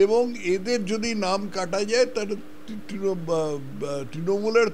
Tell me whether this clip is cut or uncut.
uncut